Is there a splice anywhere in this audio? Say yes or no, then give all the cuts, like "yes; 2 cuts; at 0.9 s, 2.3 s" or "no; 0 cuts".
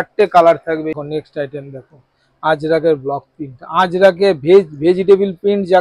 yes; 1 cut; at 0.9 s